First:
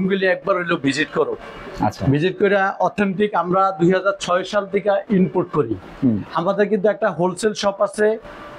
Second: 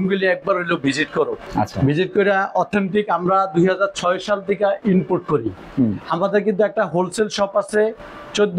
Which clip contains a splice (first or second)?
second